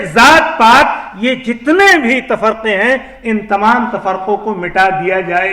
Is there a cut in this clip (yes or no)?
no